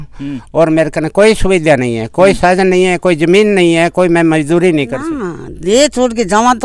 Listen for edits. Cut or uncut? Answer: cut